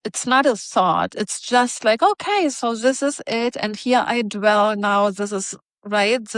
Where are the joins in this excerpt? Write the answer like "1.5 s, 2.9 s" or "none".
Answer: none